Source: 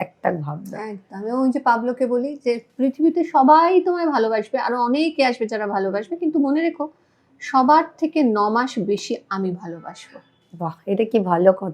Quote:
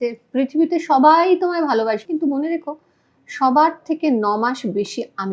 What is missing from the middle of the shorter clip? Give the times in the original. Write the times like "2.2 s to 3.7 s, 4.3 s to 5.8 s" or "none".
4.5 s to 6.1 s